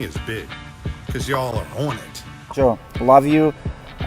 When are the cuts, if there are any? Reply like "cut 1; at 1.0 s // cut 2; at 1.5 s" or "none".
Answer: cut 1; at 2.4 s